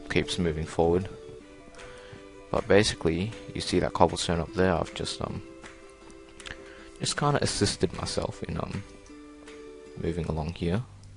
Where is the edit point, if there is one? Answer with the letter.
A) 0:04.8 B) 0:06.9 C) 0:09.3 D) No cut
A